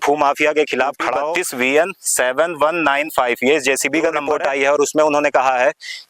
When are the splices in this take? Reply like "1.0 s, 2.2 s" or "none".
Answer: 1.2 s, 4.3 s